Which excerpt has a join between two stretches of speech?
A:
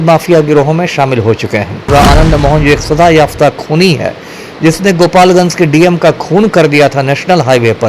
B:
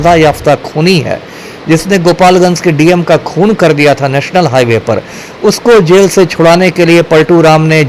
A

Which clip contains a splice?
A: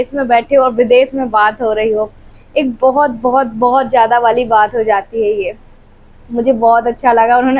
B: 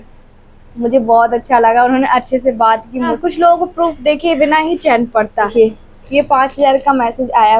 B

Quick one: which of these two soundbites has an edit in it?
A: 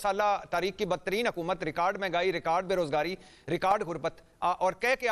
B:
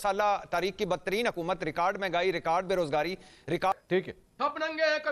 B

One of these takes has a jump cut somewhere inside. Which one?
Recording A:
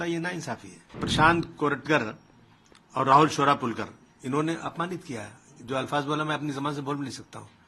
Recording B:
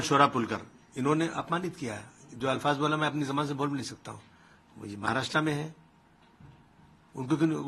A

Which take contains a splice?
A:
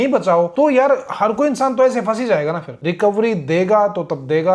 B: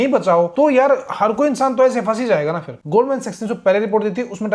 A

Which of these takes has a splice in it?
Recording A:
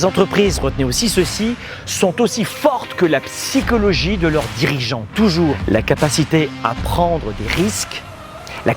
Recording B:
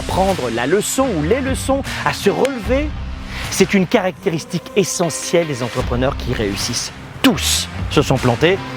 A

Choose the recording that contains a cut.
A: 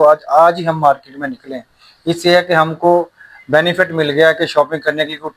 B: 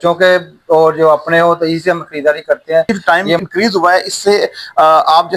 B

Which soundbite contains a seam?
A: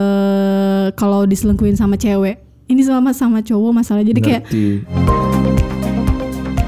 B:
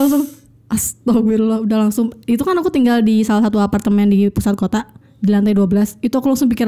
A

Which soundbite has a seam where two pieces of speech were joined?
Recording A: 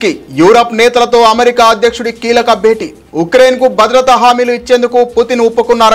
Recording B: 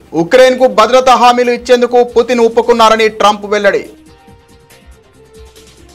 B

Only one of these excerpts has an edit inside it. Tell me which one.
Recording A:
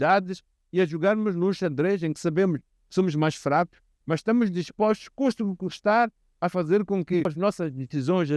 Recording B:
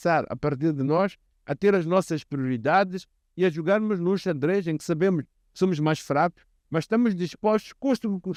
A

